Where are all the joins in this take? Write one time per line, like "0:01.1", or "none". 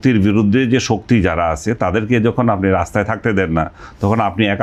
none